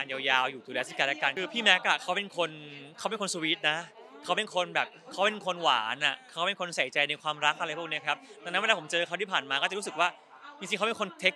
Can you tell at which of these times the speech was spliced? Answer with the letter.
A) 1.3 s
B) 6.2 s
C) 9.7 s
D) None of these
A